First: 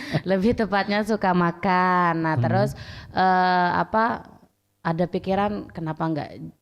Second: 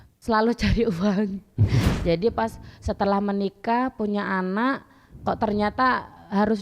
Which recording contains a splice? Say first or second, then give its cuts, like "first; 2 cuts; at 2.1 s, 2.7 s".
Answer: second; 1 cut; at 1.8 s